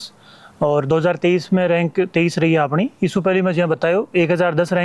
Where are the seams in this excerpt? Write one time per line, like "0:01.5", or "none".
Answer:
none